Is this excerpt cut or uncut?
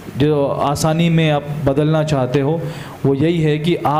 uncut